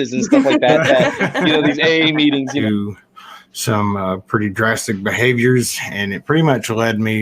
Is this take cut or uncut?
cut